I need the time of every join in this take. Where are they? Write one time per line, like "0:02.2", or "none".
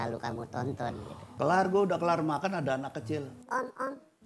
0:01.2